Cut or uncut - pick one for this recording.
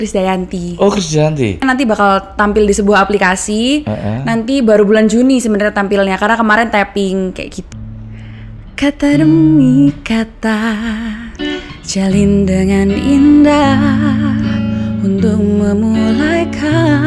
cut